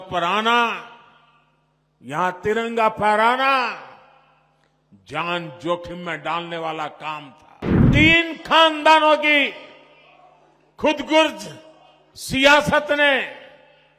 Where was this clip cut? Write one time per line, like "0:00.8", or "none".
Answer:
0:07.8